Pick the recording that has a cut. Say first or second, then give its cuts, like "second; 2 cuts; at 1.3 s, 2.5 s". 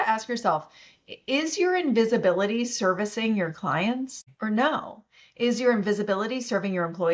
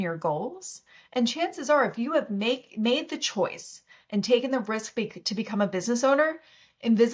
first; 1 cut; at 4.2 s